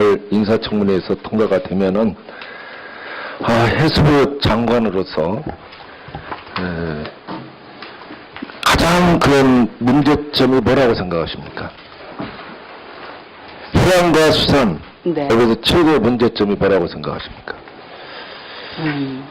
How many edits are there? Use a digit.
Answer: 0